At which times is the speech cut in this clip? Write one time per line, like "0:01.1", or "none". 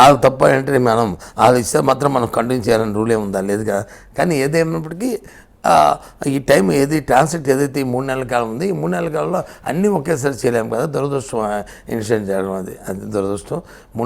none